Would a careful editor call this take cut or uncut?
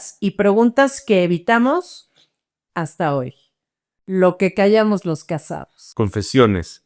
cut